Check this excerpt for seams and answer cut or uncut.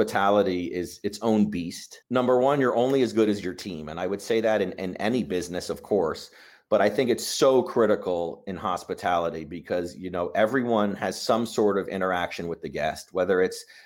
cut